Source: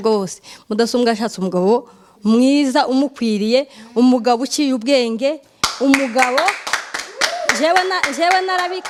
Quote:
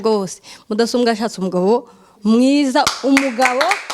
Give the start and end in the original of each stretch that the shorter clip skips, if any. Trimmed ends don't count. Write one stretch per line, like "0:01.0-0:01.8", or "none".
0:02.9-0:05.6